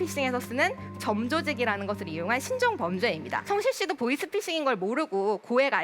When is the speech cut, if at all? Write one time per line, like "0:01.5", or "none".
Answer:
0:03.4